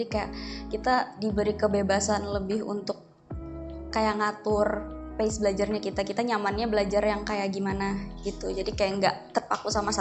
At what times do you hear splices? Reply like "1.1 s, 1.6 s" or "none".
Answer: none